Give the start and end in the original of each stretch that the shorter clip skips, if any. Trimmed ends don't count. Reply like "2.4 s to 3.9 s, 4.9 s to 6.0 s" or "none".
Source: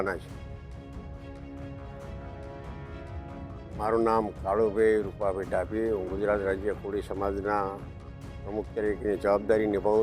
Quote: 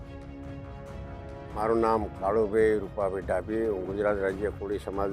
2.7 s to 3.8 s